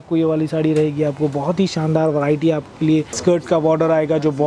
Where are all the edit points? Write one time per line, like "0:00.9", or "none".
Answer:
0:03.1